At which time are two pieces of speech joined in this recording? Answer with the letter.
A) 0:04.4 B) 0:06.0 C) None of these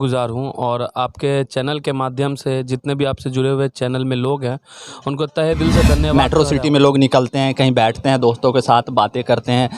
B